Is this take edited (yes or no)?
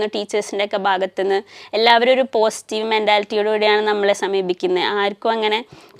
no